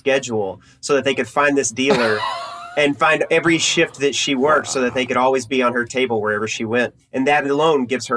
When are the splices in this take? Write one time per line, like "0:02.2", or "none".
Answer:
0:07.0